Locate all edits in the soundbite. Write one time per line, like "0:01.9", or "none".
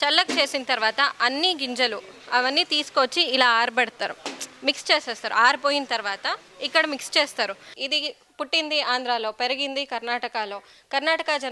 0:07.7